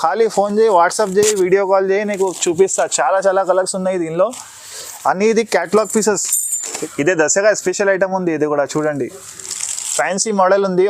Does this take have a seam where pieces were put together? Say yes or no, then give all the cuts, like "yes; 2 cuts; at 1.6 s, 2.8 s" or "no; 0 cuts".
yes; 1 cut; at 6.7 s